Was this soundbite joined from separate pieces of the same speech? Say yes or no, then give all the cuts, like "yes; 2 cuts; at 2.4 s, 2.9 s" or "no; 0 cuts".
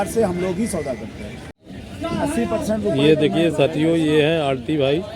yes; 1 cut; at 1.5 s